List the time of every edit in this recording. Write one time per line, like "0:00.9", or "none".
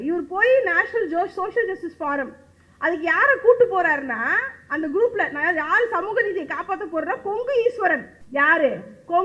0:08.1